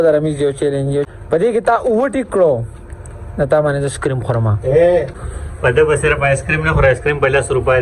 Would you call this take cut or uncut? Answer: cut